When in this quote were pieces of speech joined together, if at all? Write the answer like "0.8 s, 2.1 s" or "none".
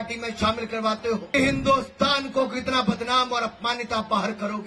1.3 s